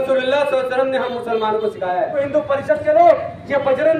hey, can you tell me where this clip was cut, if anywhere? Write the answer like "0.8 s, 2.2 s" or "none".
2.2 s